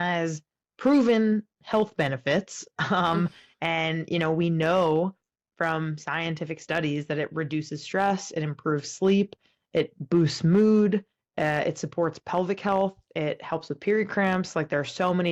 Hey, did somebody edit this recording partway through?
no; 0 cuts

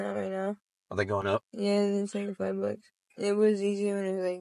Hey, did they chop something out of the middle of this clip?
yes; 1 cut; at 2.9 s

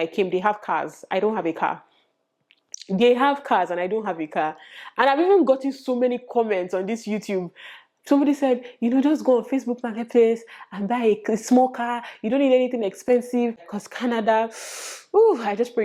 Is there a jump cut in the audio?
yes; 1 cut; at 13.7 s

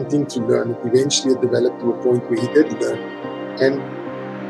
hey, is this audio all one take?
yes; 0 cuts

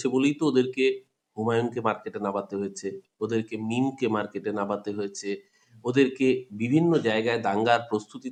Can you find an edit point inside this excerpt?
no; 0 cuts

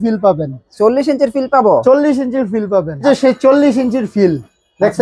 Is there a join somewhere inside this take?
yes; 1 cut; at 3.0 s

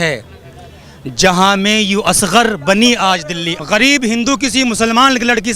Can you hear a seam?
yes; 1 cut; at 3.5 s

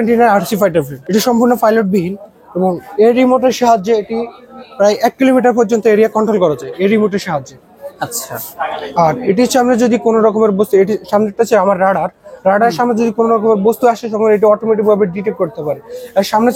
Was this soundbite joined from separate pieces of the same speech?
yes; 1 cut; at 1.0 s

